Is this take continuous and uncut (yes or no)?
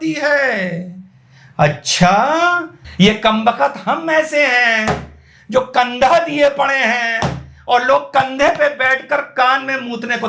no